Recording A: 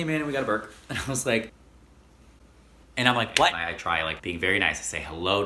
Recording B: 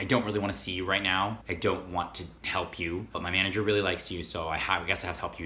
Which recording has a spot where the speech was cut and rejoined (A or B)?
A